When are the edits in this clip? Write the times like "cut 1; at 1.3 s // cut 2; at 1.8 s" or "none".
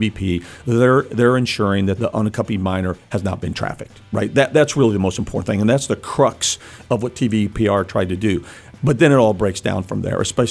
cut 1; at 2.0 s